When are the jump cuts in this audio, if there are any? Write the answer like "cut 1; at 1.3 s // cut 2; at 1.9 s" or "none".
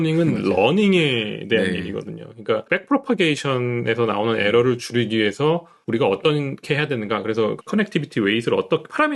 cut 1; at 2.7 s // cut 2; at 5.7 s // cut 3; at 7.6 s